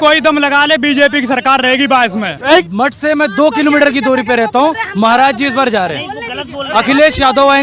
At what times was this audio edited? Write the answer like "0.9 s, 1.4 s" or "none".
2.7 s